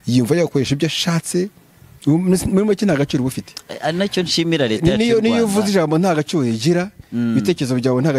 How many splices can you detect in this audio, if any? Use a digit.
0